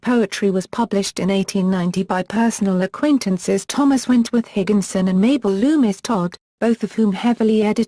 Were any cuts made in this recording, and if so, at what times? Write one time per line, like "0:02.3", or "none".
0:05.6

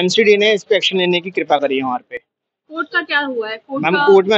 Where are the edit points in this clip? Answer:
none

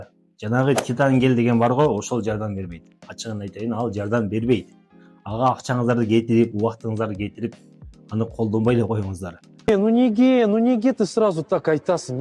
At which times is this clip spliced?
none

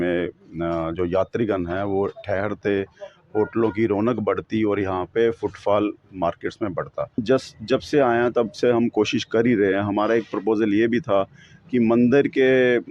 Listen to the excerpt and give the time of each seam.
0:07.2

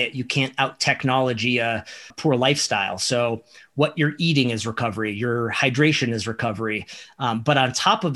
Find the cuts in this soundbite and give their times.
0:02.1

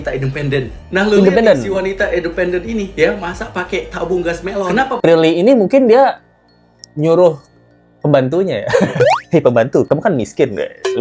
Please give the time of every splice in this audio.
0:04.9

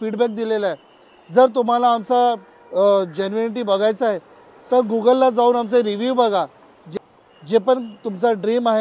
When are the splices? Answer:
0:06.9

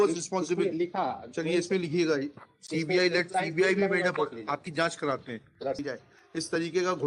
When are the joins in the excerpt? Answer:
0:05.8

